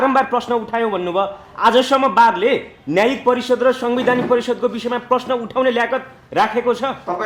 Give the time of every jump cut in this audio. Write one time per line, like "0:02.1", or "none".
none